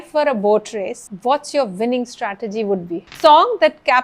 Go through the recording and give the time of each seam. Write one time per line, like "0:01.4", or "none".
0:01.1
0:03.1

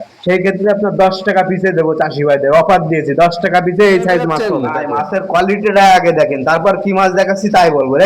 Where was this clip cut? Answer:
0:04.7

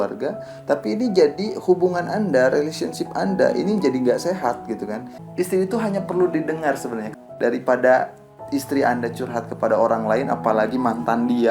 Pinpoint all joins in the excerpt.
0:05.2
0:07.1

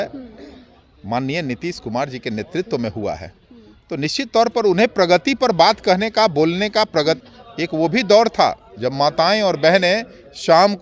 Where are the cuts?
0:07.3

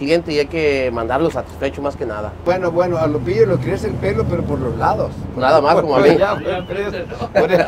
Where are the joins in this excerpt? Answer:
0:02.4

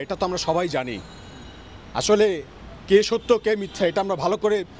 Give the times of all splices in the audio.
none

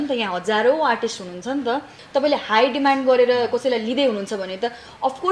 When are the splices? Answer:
0:01.9

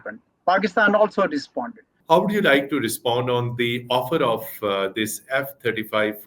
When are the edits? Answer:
0:01.9

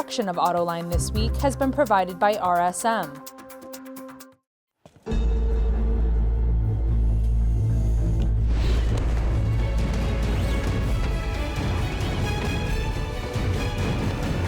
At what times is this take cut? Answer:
0:03.1
0:04.2

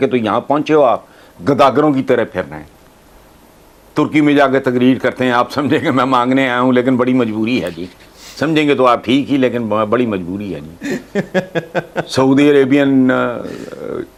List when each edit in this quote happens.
none

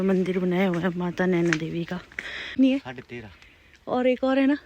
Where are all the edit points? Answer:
0:02.5

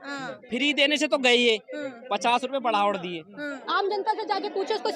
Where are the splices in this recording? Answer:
0:03.6

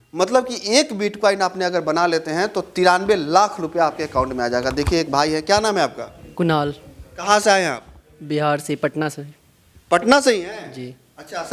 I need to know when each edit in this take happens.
none

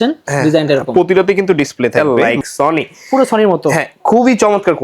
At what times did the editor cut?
0:02.0

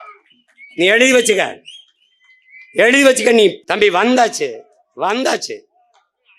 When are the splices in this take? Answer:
0:03.6

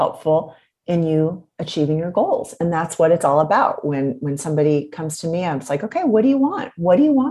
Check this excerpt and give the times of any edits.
none

